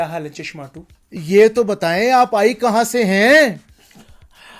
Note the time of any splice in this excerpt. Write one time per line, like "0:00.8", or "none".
0:00.9

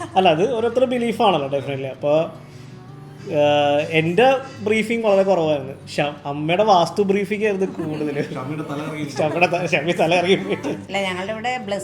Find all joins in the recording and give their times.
0:10.8

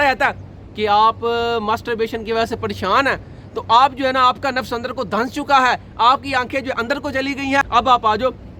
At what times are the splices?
0:07.6

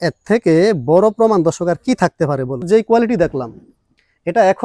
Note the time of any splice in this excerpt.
0:02.6

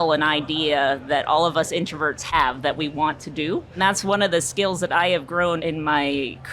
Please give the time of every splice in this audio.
0:03.8
0:05.6

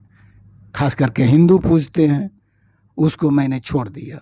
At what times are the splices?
none

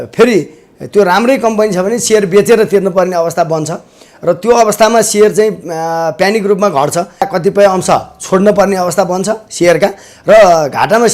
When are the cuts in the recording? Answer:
0:07.3

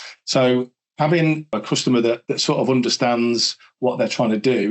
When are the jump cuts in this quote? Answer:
0:01.6

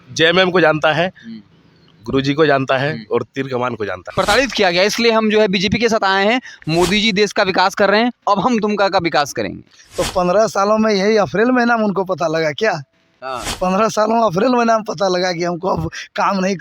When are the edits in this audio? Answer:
0:04.0

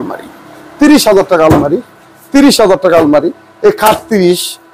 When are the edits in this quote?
none

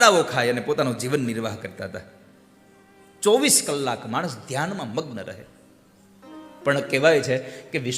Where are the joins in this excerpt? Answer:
0:06.3

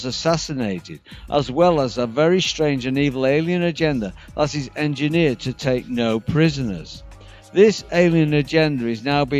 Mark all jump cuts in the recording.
none

